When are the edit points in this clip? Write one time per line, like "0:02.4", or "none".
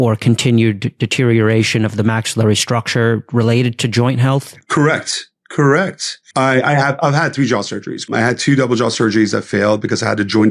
0:04.6
0:06.4
0:08.1